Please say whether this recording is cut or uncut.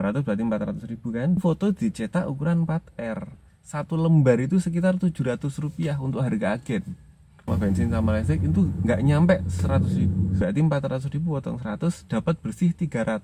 cut